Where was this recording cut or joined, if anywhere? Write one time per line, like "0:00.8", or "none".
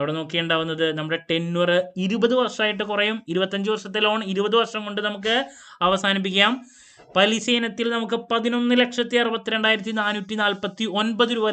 none